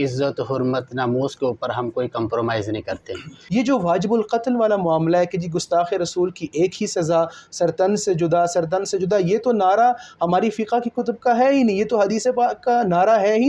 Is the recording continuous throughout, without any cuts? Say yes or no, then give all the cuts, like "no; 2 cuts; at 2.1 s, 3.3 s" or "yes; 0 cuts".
no; 1 cut; at 3.4 s